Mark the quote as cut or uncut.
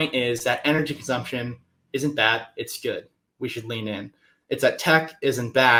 uncut